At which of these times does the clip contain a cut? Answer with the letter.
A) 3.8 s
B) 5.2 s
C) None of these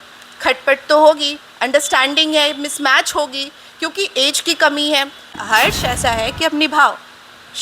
B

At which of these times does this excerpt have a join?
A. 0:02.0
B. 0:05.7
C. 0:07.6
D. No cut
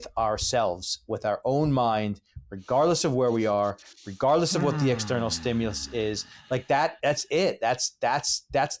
D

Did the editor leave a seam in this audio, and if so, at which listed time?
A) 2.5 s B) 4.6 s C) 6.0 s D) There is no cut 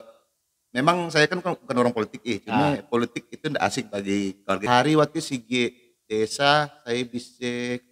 B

